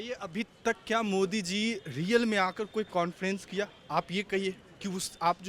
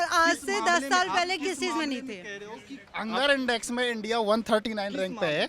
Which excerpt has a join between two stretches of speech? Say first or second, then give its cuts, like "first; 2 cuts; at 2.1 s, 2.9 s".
second; 1 cut; at 2.8 s